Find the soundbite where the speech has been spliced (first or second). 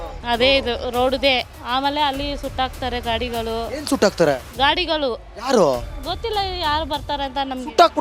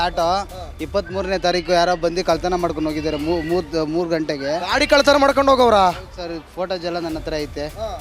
first